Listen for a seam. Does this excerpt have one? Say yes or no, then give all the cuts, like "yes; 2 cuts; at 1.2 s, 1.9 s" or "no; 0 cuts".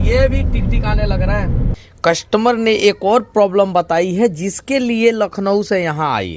yes; 1 cut; at 1.8 s